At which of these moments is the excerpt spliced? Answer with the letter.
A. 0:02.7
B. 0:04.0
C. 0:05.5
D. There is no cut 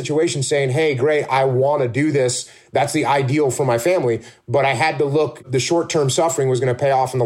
C